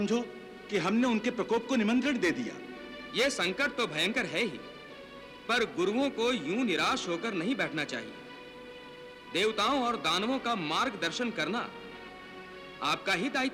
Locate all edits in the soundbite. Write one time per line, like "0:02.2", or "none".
none